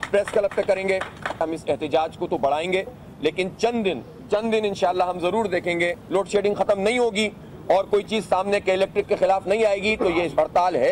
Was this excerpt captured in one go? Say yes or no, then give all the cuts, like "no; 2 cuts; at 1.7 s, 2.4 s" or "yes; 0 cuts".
no; 3 cuts; at 1.1 s, 4.1 s, 6.0 s